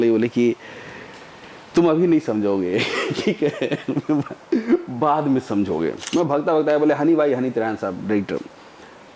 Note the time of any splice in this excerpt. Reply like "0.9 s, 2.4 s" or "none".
6.0 s